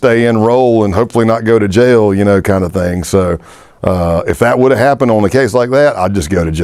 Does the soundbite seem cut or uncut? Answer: uncut